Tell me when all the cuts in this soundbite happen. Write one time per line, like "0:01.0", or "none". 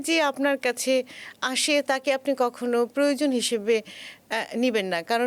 none